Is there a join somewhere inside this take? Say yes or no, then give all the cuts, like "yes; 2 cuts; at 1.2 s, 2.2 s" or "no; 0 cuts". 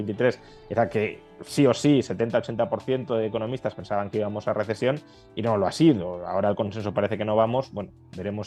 no; 0 cuts